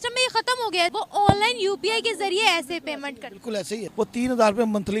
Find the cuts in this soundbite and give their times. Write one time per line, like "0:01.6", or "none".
0:00.9
0:03.8

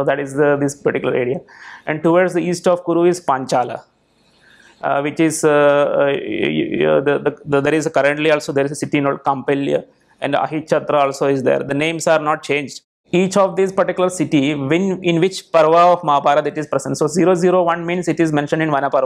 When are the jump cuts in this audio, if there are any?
0:12.9

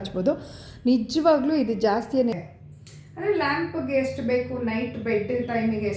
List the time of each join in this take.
0:02.3

